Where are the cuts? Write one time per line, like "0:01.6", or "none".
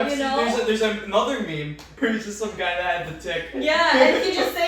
0:01.9